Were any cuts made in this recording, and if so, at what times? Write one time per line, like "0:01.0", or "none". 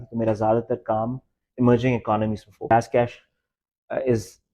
0:02.7